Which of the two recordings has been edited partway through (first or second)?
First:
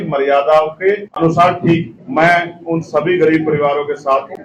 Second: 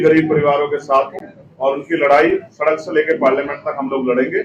first